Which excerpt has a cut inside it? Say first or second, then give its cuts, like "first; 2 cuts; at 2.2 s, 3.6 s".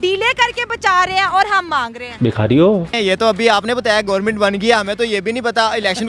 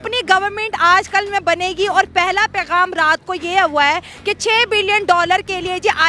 first; 1 cut; at 2.9 s